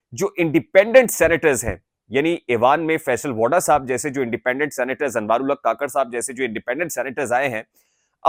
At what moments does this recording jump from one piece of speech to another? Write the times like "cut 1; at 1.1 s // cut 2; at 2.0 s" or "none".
none